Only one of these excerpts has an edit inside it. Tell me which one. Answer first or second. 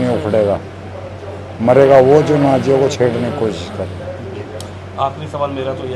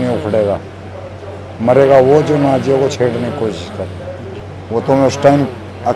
second